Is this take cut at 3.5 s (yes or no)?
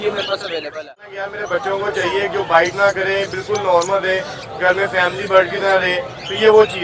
no